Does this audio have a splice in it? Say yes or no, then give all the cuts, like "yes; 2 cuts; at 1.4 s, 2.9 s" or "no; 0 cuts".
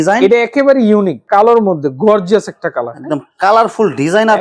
yes; 1 cut; at 1.2 s